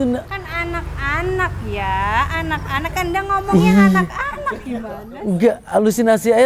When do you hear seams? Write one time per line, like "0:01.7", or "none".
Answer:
none